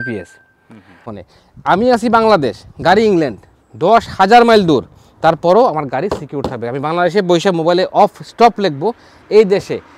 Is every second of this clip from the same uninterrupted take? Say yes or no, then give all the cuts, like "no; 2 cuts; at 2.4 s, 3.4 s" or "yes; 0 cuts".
no; 1 cut; at 1.1 s